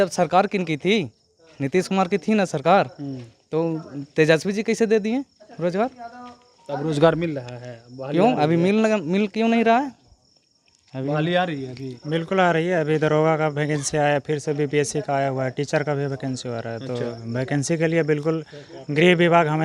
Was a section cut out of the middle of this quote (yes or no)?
no